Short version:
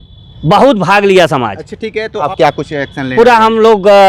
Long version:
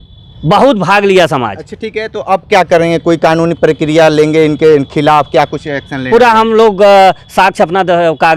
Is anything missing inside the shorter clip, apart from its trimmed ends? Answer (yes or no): yes